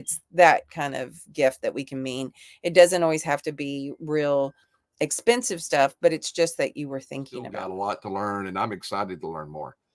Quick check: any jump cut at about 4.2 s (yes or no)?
no